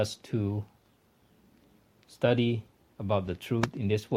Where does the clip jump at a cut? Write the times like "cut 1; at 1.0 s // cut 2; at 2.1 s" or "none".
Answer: none